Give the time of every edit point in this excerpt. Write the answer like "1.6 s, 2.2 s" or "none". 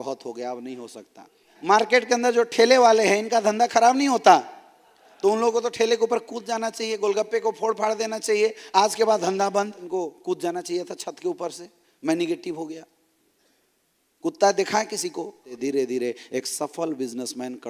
1.5 s, 9.8 s, 15.5 s